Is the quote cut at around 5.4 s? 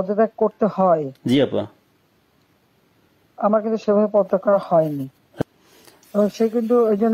yes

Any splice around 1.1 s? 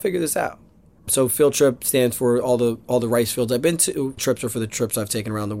yes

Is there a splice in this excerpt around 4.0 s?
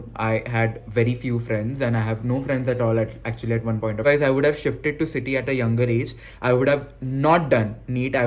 yes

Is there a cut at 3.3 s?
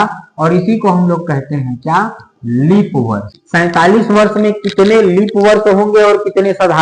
yes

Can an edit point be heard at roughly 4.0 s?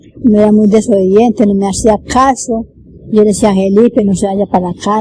yes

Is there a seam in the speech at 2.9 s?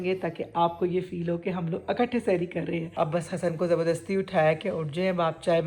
yes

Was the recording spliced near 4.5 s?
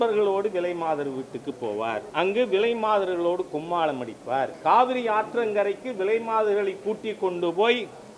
yes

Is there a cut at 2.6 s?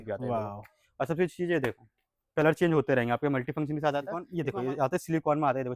no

